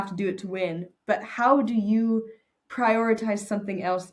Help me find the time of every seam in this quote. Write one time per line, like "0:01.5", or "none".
none